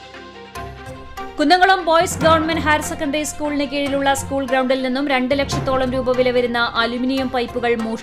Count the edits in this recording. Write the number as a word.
zero